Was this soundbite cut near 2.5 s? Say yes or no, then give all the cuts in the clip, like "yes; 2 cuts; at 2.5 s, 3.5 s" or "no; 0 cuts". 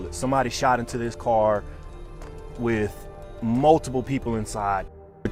no; 0 cuts